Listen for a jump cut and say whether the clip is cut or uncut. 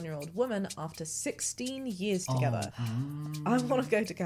cut